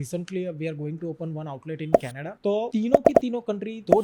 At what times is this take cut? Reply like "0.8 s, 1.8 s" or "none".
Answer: none